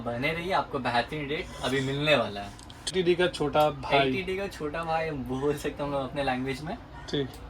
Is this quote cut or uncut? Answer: cut